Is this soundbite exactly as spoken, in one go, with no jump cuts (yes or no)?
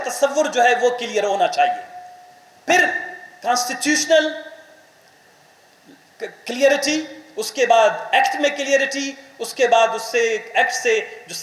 yes